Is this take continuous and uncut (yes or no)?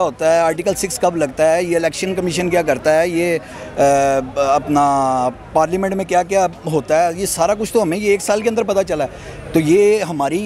yes